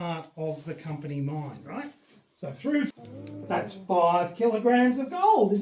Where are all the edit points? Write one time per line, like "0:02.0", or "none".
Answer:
0:02.9